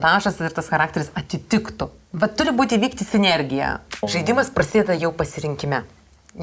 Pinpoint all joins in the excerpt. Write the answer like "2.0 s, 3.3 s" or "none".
4.1 s